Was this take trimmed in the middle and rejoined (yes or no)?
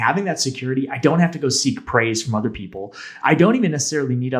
yes